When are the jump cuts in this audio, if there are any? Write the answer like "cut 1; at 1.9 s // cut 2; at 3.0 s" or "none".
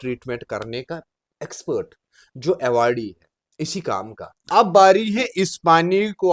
cut 1; at 4.4 s